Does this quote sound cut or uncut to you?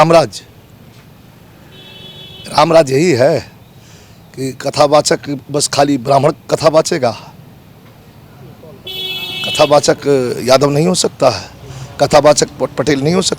uncut